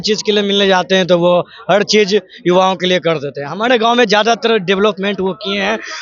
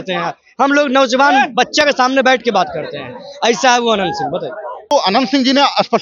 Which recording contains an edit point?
second; 1 cut; at 4.9 s

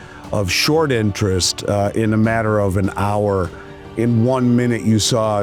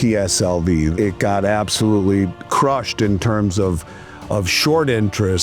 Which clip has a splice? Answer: second; 2 cuts; at 0.9 s, 2.4 s

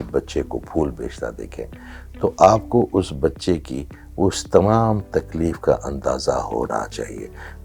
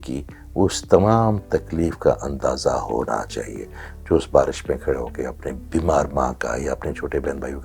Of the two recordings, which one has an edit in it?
second; 1 cut; at 5.6 s

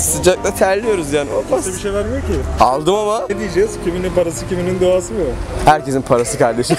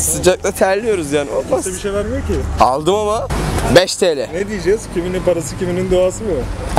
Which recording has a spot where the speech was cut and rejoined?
first; 1 cut; at 3.3 s

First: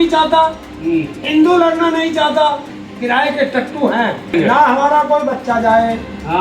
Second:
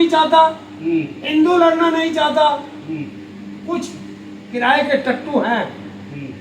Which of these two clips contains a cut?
first; 2 cuts; at 2.8 s, 4.3 s

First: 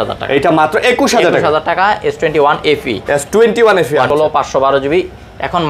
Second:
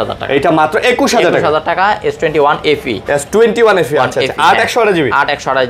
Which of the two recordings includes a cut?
first; 1 cut; at 4.1 s

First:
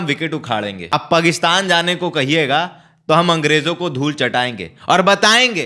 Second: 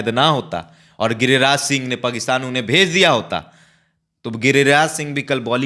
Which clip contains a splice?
first; 1 cut; at 0.9 s

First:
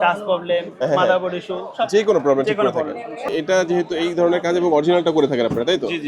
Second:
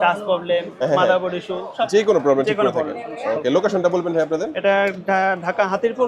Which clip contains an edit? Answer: first; 1 cut; at 3.3 s

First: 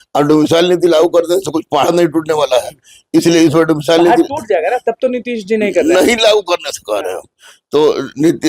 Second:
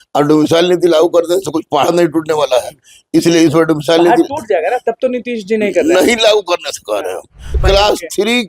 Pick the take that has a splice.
second; 1 cut; at 7.6 s

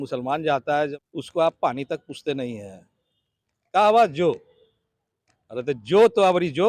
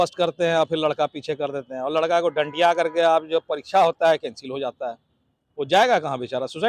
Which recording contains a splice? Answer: first; 1 cut; at 0.9 s

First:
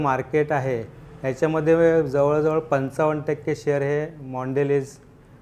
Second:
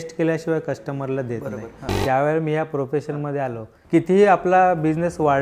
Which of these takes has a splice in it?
second; 2 cuts; at 1.9 s, 3.7 s

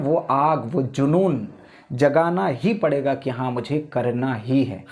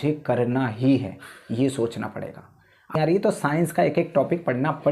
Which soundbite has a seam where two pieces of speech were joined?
second; 1 cut; at 2.9 s

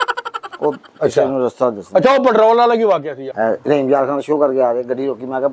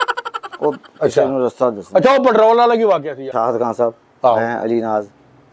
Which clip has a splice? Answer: first; 1 cut; at 3.2 s

